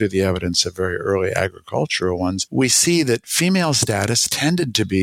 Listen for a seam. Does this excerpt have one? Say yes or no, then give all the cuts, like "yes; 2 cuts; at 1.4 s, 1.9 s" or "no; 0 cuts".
no; 0 cuts